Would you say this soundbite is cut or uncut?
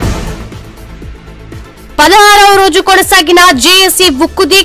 cut